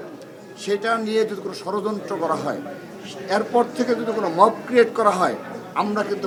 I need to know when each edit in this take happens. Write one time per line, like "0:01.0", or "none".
none